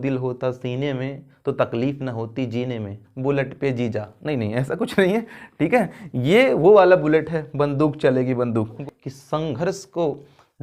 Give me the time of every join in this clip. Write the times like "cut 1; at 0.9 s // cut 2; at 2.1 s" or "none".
cut 1; at 3.1 s // cut 2; at 8.8 s